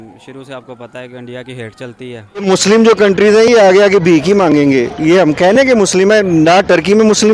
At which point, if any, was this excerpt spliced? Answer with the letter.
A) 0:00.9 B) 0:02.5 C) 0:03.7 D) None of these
B